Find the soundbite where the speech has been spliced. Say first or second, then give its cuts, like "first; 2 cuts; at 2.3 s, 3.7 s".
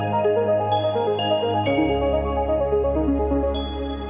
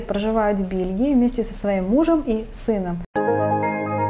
second; 1 cut; at 3.0 s